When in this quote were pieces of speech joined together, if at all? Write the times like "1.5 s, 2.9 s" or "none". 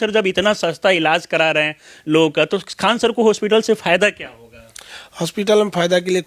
none